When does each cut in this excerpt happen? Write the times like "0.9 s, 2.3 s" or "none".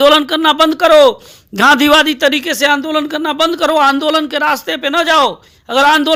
none